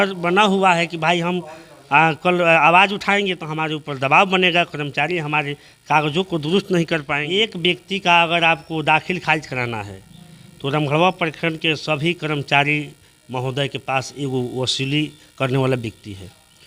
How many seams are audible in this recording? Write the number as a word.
one